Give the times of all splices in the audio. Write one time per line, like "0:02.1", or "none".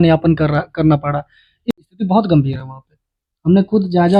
0:01.5